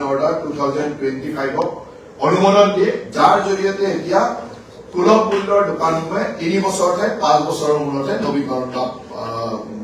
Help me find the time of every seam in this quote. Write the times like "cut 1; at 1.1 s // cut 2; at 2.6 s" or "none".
none